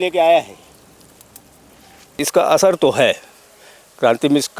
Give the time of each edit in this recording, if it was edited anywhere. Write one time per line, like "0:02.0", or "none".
0:02.2